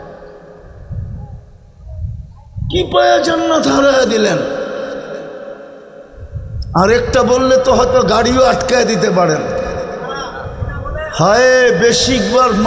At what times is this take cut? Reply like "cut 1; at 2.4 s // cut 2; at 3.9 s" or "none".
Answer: cut 1; at 6.6 s